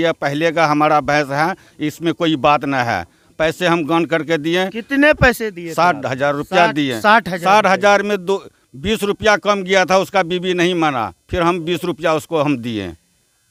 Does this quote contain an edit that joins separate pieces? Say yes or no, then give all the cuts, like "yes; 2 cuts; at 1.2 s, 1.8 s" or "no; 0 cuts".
no; 0 cuts